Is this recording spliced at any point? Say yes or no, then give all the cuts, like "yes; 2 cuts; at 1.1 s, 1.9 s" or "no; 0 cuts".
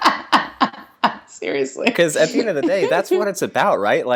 no; 0 cuts